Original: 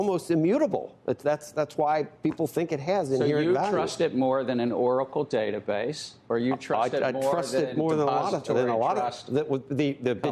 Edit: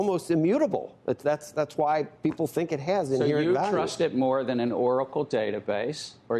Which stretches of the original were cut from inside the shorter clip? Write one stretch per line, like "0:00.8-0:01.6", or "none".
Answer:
none